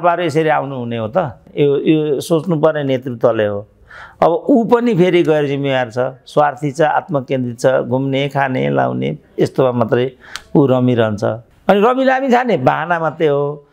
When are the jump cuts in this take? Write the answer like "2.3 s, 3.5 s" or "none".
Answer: 1.4 s, 11.5 s